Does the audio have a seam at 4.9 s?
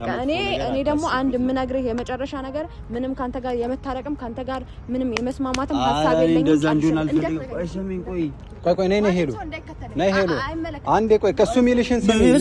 no; 0 cuts

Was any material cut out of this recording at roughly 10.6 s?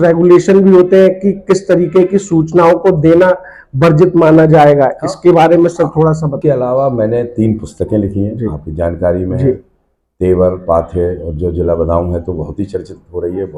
no; 1 cut; at 6.4 s

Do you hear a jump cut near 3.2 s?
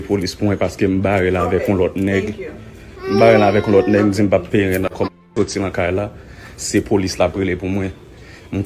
no; 0 cuts

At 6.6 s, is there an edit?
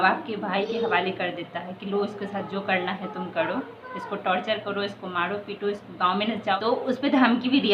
yes; 1 cut; at 6.6 s

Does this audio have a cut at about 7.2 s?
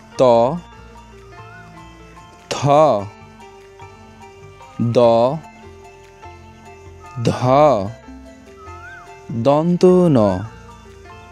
yes; 2 cuts; at 5.6 s, 7.2 s

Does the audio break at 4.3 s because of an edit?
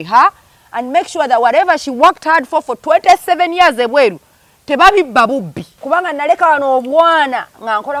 no; 1 cut; at 5.7 s

